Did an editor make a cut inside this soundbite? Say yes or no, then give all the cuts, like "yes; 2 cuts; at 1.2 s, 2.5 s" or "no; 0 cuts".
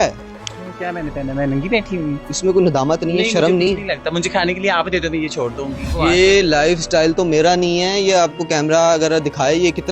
yes; 2 cuts; at 2.3 s, 5.9 s